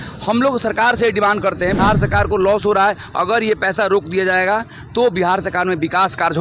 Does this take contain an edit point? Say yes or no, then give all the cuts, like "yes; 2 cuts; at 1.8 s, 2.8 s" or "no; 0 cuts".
yes; 1 cut; at 1.8 s